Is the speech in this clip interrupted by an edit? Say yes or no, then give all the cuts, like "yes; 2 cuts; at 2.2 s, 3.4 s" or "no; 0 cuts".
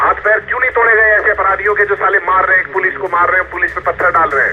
no; 0 cuts